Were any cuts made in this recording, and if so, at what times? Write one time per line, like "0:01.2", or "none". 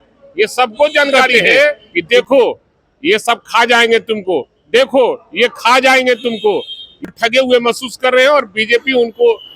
0:01.9
0:07.0